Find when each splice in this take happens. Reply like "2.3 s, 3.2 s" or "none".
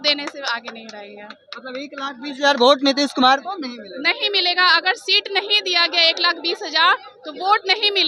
none